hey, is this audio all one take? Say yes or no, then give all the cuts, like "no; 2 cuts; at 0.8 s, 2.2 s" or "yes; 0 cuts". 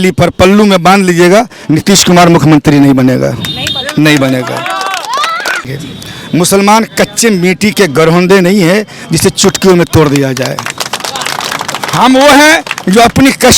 no; 1 cut; at 5.7 s